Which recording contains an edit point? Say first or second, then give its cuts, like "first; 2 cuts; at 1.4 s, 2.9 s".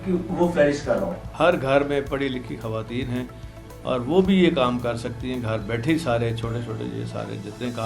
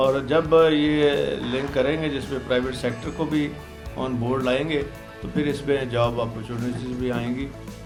first; 1 cut; at 1.2 s